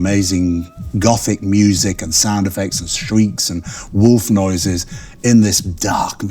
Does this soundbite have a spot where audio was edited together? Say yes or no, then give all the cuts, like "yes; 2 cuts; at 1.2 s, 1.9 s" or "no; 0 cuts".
no; 0 cuts